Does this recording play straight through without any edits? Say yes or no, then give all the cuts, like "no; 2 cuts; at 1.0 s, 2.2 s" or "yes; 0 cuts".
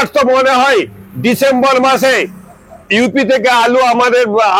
yes; 0 cuts